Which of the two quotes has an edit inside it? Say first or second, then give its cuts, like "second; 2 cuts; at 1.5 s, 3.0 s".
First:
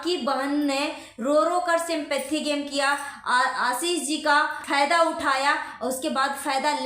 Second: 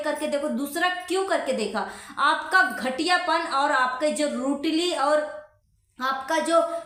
first; 1 cut; at 4.6 s